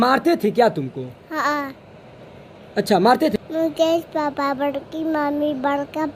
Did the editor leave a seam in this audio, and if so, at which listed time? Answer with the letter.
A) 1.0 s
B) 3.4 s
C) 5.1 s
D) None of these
B